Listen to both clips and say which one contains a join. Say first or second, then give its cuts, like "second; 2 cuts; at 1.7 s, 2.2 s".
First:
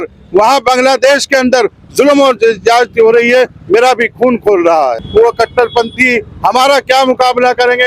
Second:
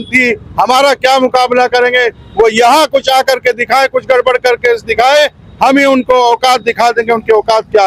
first; 1 cut; at 4.9 s